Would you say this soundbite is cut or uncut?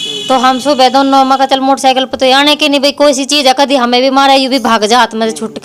uncut